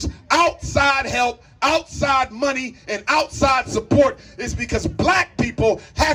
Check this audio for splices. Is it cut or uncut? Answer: uncut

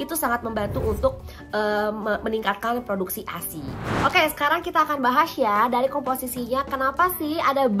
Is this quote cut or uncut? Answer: cut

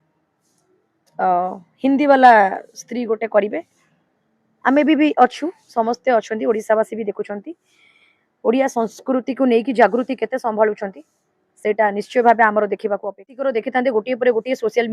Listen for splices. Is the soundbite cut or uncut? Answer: cut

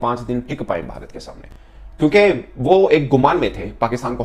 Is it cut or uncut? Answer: uncut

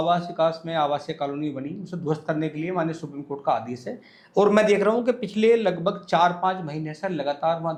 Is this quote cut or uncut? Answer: uncut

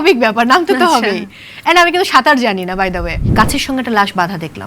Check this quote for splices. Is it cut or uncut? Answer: cut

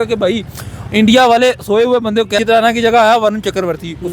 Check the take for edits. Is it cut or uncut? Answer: cut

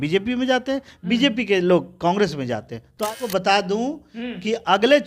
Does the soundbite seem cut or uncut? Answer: cut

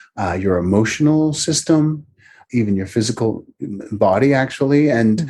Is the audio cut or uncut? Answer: cut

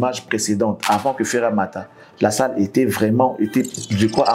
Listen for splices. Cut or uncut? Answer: uncut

